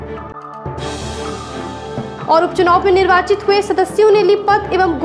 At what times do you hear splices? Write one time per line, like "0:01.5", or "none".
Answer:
none